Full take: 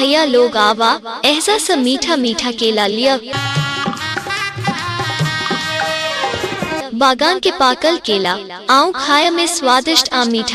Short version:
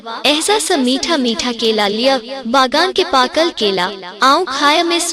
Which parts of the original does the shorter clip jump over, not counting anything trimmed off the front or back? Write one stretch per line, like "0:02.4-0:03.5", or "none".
0:03.3-0:06.8